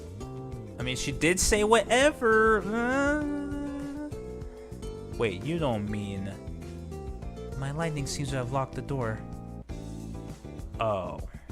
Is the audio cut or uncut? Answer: cut